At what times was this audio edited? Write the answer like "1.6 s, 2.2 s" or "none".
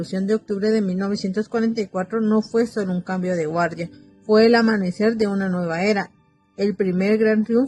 none